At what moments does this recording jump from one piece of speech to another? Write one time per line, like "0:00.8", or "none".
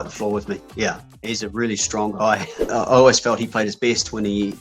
0:01.0
0:02.7